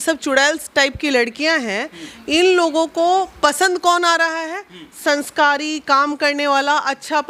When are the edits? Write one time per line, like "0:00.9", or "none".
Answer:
none